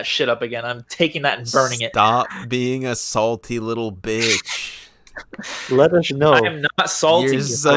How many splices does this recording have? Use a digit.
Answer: 0